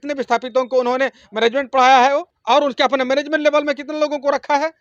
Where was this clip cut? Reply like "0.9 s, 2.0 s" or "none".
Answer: 2.3 s